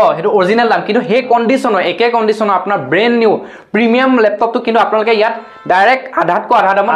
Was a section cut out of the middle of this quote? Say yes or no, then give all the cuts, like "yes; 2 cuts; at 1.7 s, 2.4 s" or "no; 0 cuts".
no; 0 cuts